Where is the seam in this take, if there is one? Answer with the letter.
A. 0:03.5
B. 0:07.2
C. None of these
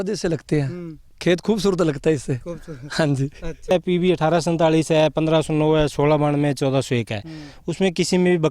A